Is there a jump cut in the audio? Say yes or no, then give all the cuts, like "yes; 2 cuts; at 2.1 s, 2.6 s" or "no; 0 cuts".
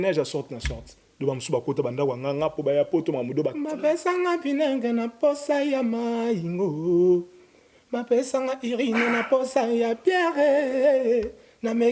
yes; 1 cut; at 3.6 s